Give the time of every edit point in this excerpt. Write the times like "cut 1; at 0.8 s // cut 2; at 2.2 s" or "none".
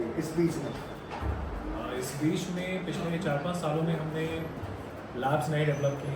none